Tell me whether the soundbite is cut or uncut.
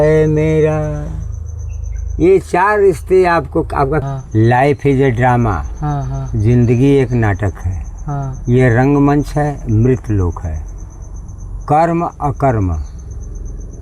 cut